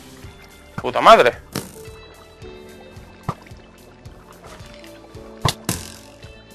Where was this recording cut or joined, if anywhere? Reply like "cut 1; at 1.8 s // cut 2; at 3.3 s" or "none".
cut 1; at 1.4 s